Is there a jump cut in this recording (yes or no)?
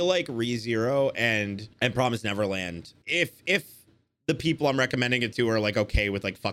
yes